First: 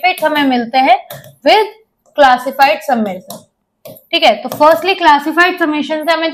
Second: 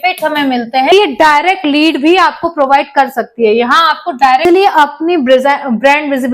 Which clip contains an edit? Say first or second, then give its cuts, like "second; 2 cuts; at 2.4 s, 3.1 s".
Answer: second; 2 cuts; at 0.9 s, 4.4 s